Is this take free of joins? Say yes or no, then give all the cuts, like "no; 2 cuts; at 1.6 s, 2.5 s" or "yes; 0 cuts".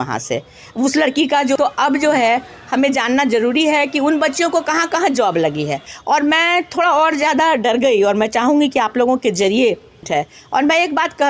no; 3 cuts; at 1.6 s, 5.9 s, 10.1 s